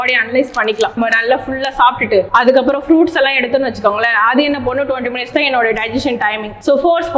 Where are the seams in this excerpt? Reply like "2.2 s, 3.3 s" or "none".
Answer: 0.9 s